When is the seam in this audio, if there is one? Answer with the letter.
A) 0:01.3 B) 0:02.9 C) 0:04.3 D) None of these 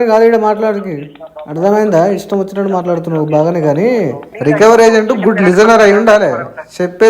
C